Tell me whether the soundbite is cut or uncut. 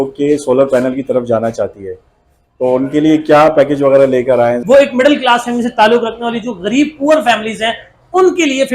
cut